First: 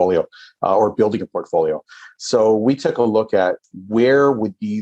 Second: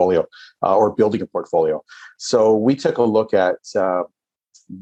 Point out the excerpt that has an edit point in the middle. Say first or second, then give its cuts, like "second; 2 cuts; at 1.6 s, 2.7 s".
first; 1 cut; at 3.6 s